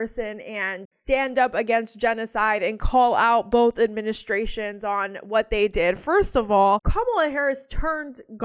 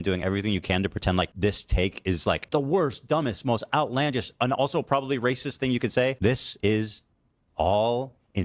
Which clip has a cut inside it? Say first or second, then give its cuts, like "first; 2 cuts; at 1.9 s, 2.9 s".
second; 3 cuts; at 1.3 s, 2.4 s, 6.5 s